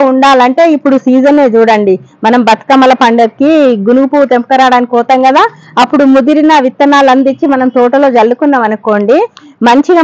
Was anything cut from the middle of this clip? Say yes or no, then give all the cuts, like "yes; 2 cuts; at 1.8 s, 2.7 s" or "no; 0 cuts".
no; 0 cuts